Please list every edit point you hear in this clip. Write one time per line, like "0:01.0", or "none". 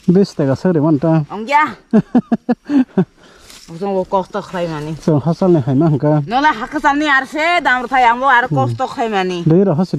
none

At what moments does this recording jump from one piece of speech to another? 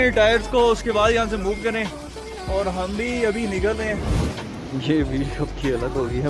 0:04.2

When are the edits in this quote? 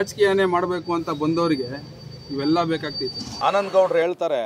0:03.2

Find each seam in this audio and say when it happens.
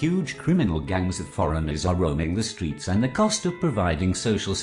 0:02.4

